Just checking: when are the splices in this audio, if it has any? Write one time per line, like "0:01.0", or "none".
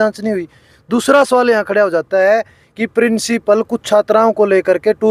none